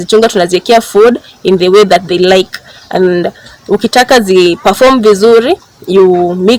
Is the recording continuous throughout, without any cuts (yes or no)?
yes